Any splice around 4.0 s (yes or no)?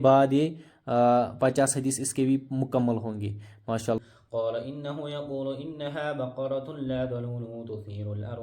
yes